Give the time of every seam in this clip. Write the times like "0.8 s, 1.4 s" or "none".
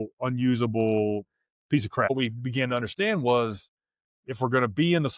2.1 s